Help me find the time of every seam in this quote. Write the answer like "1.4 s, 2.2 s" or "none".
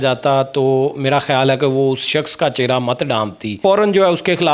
3.6 s